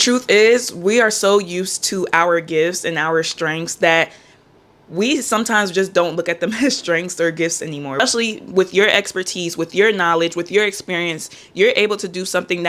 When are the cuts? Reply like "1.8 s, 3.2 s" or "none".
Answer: 8.0 s